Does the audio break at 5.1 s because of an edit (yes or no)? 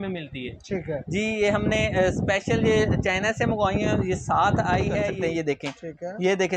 yes